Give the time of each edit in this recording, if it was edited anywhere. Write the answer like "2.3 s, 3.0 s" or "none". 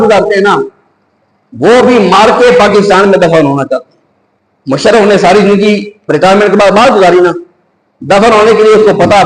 none